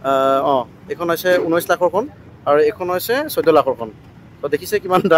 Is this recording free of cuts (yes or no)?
yes